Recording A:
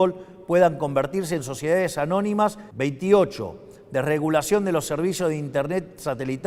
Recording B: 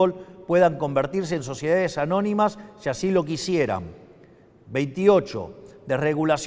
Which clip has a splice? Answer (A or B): A